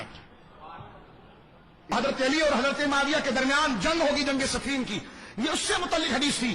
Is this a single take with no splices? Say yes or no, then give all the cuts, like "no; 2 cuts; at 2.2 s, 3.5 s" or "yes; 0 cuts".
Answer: no; 1 cut; at 1.9 s